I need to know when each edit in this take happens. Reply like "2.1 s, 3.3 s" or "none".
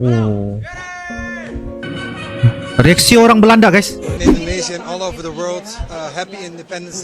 4.2 s

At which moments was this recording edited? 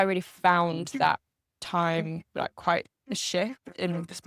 none

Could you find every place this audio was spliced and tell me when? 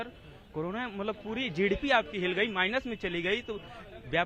none

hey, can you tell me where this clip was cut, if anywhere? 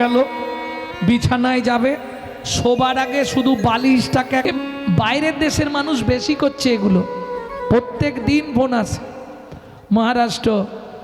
4.5 s

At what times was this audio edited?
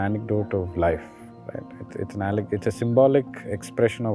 none

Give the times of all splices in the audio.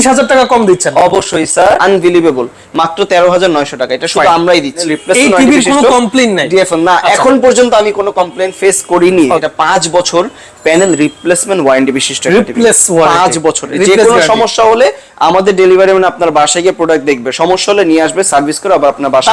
1.8 s, 4.9 s, 9.4 s, 13.7 s

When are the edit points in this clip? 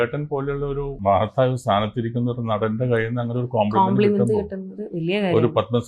1.0 s

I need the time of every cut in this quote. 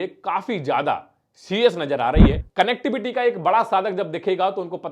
2.4 s

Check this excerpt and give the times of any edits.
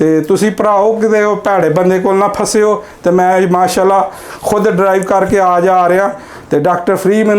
none

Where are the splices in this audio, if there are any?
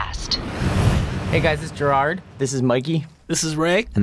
1.3 s

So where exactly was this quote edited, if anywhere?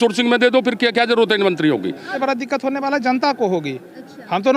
2.1 s

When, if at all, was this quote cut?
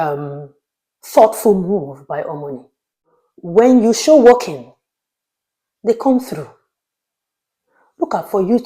3.2 s

